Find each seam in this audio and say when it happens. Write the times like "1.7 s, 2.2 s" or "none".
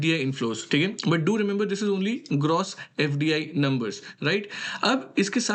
none